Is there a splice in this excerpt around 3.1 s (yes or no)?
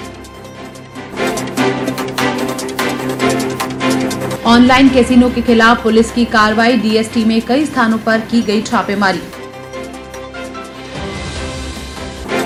no